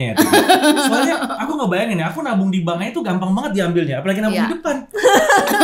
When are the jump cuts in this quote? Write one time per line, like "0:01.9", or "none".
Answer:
none